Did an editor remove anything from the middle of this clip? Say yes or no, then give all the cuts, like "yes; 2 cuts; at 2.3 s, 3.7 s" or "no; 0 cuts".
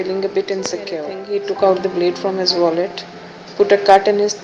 yes; 1 cut; at 1.1 s